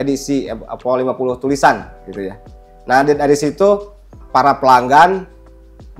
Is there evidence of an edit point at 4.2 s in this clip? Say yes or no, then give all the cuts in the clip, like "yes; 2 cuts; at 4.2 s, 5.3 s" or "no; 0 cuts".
yes; 1 cut; at 4.2 s